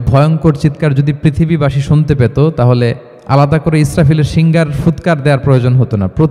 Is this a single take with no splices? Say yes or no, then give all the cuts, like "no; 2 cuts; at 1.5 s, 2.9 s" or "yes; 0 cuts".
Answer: no; 1 cut; at 3.1 s